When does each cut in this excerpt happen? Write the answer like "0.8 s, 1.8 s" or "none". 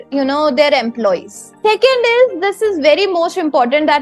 1.5 s